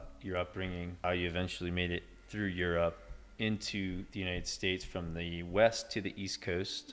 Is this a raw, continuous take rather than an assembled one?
no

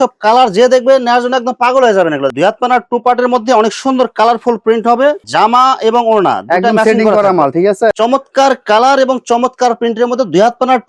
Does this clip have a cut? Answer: yes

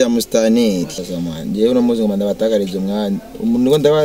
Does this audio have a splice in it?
yes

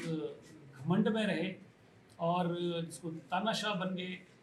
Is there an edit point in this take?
no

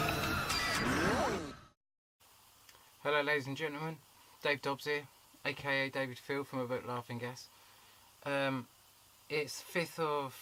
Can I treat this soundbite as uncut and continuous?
yes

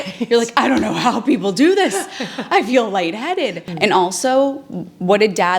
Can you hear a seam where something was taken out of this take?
yes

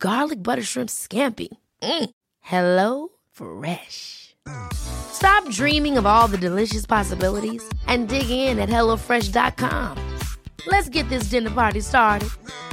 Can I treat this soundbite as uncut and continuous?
yes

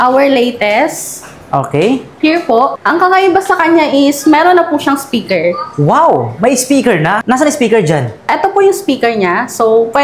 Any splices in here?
yes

